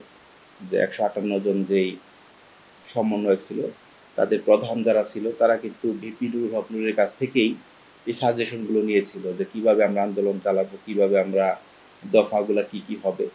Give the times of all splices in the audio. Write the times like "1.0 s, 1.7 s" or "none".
none